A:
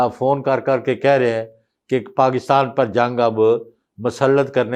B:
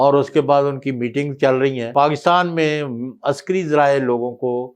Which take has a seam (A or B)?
B